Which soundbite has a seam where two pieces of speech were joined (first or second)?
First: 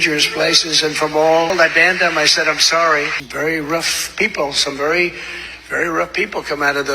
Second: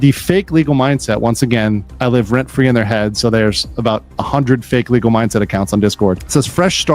first